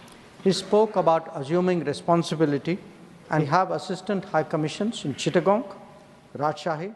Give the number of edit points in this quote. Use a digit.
1